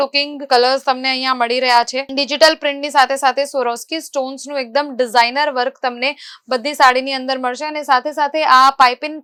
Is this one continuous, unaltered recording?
yes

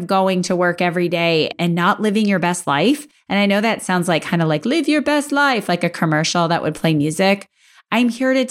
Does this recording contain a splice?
yes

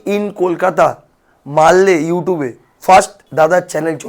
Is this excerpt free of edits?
no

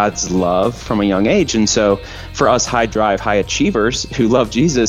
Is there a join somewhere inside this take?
no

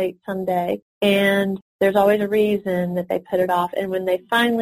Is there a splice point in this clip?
yes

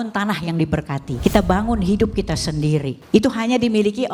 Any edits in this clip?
yes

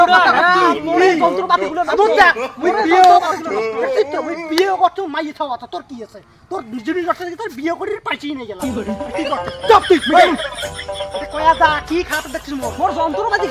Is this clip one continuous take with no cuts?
yes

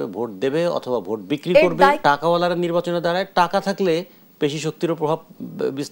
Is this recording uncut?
no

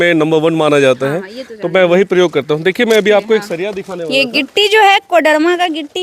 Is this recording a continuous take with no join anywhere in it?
yes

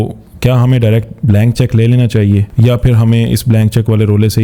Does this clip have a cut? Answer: yes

